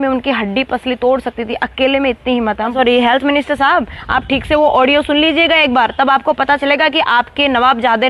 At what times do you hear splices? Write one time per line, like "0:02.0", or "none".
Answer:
0:02.7